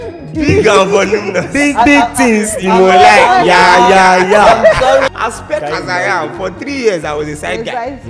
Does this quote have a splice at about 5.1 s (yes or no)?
yes